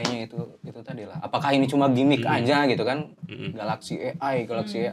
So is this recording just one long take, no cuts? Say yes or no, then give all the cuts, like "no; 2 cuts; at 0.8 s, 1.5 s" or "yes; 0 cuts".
yes; 0 cuts